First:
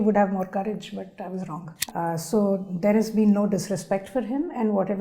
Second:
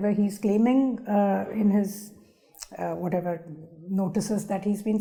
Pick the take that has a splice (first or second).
first